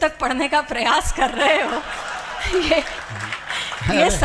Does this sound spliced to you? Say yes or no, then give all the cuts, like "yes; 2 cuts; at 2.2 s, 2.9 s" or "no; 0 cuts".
no; 0 cuts